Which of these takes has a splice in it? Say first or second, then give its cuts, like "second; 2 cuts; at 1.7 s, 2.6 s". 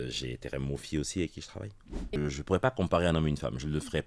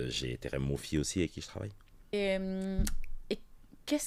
first; 1 cut; at 2.2 s